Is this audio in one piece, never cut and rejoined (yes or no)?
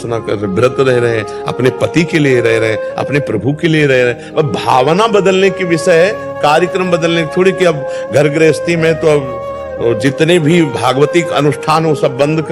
yes